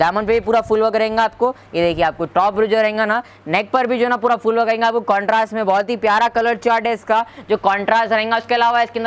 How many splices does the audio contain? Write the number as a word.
zero